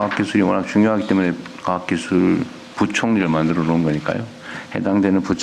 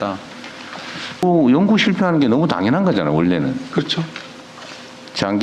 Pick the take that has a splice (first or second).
second